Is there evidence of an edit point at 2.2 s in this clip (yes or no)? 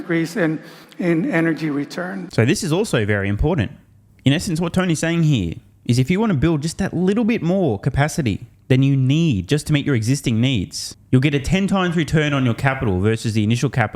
no